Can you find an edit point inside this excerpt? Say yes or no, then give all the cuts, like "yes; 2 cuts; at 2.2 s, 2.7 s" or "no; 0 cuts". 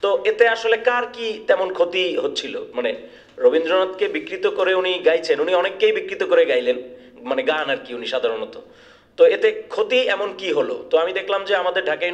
no; 0 cuts